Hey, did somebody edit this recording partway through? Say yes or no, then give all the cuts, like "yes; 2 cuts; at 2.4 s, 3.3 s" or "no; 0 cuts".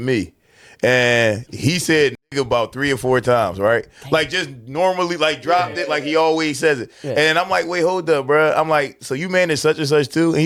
no; 0 cuts